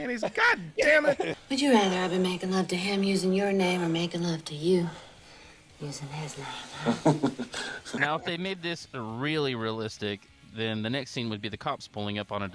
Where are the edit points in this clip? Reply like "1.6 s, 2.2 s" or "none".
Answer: 1.3 s, 7.9 s